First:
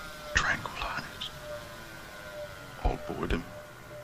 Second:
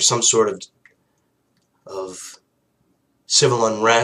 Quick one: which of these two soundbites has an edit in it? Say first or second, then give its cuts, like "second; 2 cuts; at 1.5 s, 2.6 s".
first; 1 cut; at 1.4 s